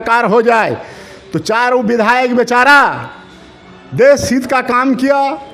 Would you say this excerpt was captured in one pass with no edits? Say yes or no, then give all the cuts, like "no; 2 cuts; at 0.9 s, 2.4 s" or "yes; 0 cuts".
yes; 0 cuts